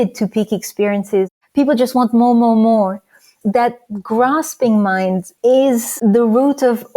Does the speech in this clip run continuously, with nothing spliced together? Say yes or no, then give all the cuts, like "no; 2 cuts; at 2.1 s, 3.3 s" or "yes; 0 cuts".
no; 4 cuts; at 1.3 s, 3.3 s, 5.3 s, 5.9 s